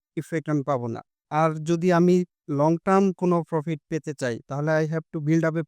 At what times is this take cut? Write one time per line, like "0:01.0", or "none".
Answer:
0:01.1
0:02.4